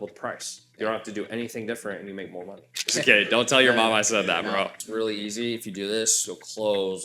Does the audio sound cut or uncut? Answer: cut